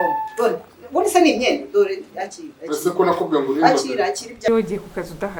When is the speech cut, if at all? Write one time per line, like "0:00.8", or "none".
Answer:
0:04.5